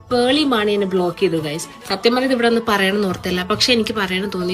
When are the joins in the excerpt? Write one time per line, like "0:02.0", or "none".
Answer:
none